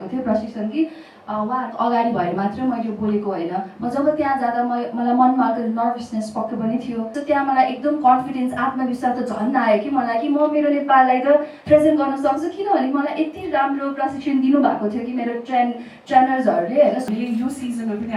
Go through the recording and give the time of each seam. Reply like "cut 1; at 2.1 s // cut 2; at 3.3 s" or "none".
cut 1; at 7.1 s // cut 2; at 17.0 s